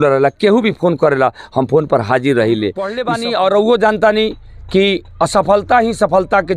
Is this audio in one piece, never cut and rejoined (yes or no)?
no